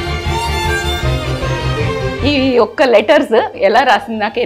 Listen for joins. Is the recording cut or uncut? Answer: cut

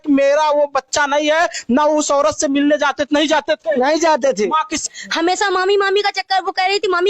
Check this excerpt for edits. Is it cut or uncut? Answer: cut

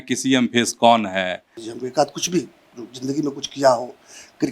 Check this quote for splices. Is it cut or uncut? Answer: cut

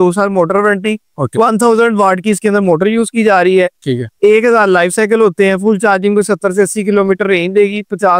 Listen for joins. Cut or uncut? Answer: uncut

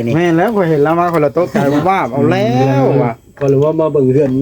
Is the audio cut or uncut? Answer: uncut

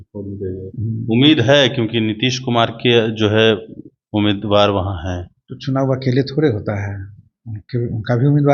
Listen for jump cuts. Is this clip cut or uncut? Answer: uncut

